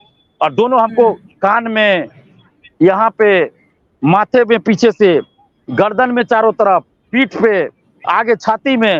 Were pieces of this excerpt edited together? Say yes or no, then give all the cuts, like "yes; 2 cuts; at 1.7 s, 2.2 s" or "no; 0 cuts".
no; 0 cuts